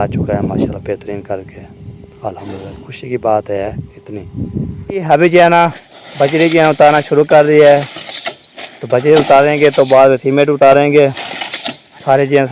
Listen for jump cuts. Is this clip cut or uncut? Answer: uncut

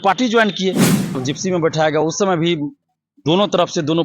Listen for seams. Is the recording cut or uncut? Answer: cut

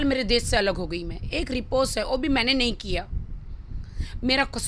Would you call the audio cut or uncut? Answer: uncut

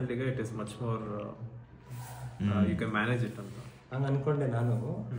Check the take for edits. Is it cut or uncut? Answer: uncut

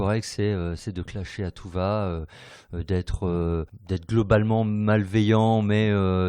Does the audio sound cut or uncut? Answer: cut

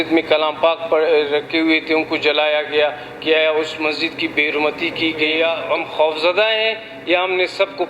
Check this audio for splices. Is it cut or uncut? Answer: cut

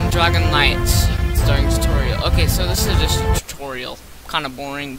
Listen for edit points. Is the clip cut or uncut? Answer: cut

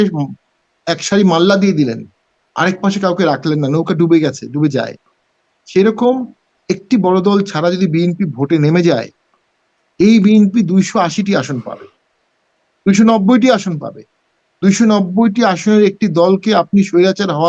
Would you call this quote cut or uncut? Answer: uncut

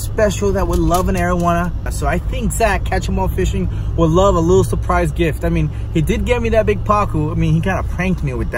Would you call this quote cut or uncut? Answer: uncut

